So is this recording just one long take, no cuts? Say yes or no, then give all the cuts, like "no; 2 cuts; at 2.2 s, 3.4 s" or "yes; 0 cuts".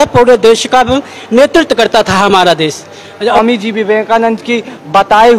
no; 1 cut; at 3.4 s